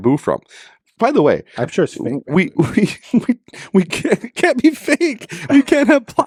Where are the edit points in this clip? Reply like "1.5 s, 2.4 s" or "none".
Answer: none